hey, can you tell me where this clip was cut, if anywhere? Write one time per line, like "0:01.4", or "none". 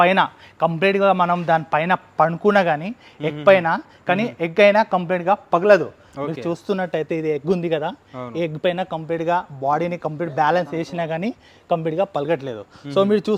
none